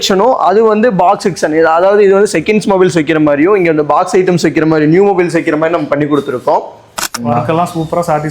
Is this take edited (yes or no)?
yes